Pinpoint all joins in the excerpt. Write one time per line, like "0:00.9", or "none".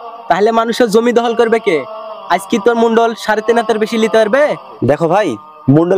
0:04.7